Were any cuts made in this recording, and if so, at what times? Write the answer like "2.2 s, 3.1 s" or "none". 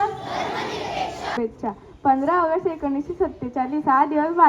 1.4 s